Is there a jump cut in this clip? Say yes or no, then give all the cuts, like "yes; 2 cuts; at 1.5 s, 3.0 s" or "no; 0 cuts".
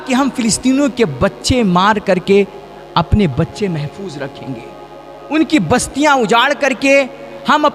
no; 0 cuts